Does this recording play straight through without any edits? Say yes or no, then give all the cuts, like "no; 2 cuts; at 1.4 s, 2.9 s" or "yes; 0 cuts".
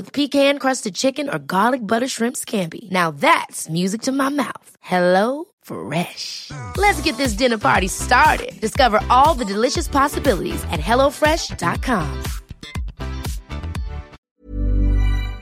no; 1 cut; at 14.2 s